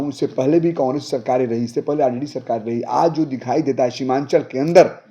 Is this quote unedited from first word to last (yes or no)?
yes